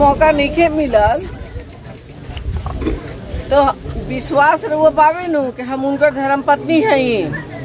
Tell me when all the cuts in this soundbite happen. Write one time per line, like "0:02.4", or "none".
none

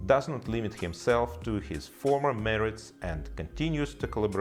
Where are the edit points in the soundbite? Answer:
none

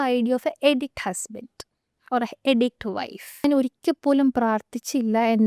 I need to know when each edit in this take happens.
0:03.4

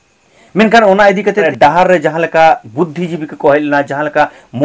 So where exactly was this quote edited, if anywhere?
0:01.5

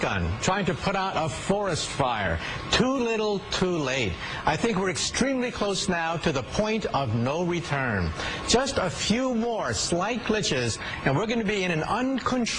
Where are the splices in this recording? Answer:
none

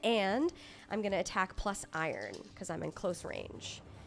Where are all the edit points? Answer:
0:02.5

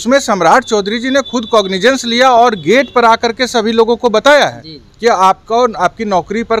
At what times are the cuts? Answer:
none

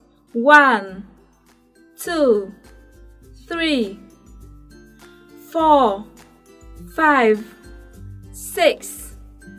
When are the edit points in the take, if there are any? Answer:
none

